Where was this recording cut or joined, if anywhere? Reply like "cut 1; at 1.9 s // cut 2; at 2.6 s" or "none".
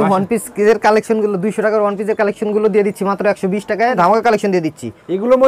cut 1; at 4.0 s